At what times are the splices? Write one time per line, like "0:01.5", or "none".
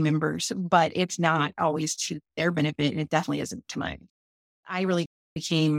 0:04.7